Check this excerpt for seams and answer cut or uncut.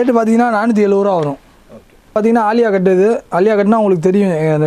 cut